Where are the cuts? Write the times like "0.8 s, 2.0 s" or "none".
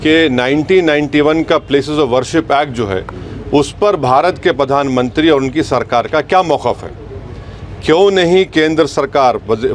none